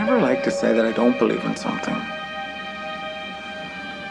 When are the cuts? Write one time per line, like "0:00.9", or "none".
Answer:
none